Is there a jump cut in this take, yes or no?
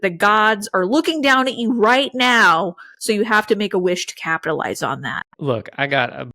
no